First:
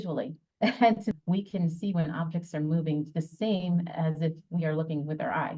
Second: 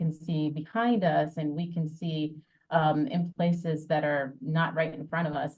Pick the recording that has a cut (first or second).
first